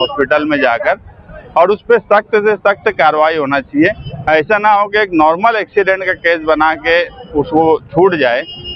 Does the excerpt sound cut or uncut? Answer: uncut